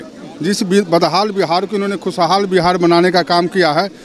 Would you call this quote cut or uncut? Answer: uncut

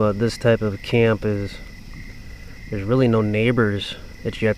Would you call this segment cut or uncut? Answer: uncut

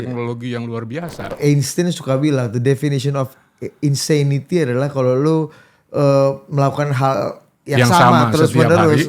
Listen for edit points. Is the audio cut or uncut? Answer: cut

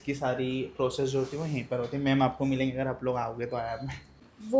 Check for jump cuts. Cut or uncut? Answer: uncut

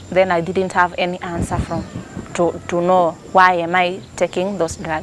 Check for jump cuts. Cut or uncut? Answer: uncut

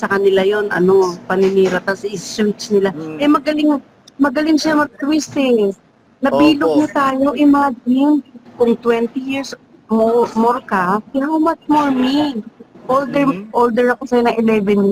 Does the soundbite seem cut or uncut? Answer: uncut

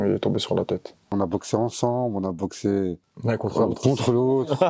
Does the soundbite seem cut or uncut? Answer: cut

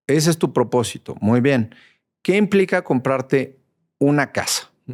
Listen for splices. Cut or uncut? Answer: uncut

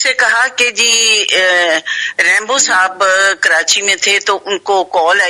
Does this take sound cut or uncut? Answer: uncut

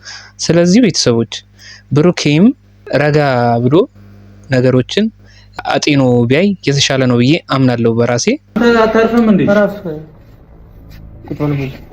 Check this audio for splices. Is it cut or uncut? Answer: cut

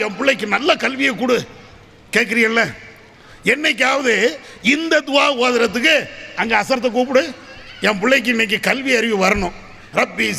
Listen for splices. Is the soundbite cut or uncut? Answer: uncut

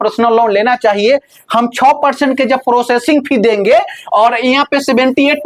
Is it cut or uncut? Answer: uncut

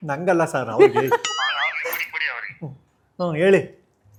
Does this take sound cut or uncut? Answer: uncut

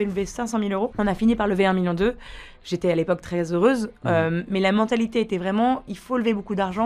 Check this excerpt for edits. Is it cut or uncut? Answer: cut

